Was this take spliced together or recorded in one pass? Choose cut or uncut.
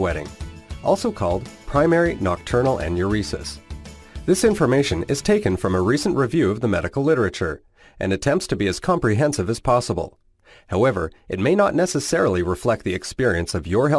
cut